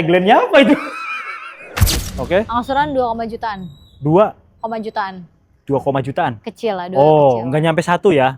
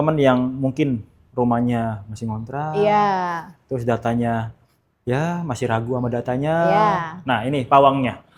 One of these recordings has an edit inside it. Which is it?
first; 1 cut; at 2.0 s

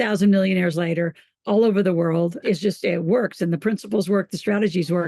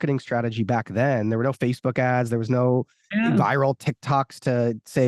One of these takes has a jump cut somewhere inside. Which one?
first; 1 cut; at 2.4 s

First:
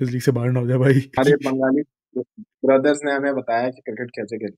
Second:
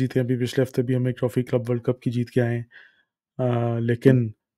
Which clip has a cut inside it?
first; 1 cut; at 1.2 s

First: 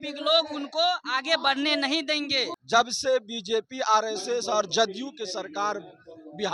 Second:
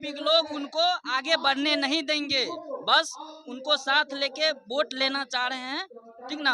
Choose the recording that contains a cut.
first; 1 cut; at 2.6 s

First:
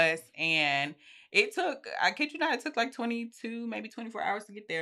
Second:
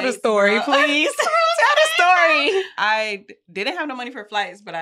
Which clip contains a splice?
second; 1 cut; at 2.7 s

